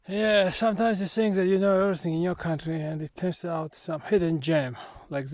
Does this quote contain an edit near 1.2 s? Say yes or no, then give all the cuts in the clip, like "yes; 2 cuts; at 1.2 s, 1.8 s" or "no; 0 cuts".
no; 0 cuts